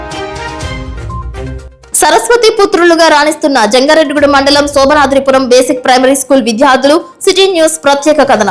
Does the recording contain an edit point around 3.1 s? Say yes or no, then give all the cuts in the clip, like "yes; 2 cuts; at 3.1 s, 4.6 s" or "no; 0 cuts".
no; 1 cut; at 1.3 s